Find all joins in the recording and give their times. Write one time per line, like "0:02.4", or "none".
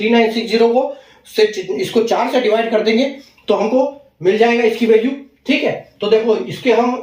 none